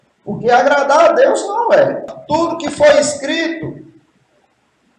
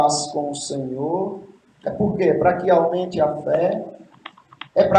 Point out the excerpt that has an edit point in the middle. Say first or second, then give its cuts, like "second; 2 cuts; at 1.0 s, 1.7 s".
first; 1 cut; at 2.1 s